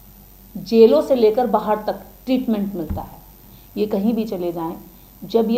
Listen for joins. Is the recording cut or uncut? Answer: uncut